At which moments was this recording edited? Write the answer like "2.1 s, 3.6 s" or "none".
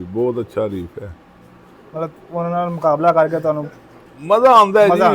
none